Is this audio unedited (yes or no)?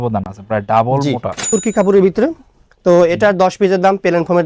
no